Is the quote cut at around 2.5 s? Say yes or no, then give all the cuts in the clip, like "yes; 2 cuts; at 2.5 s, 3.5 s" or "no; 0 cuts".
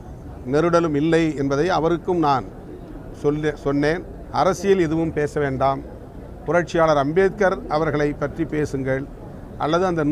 no; 1 cut; at 4.2 s